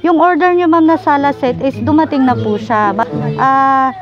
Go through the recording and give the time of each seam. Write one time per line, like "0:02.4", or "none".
0:03.0